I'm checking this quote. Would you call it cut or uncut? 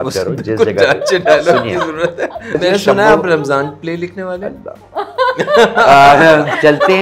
cut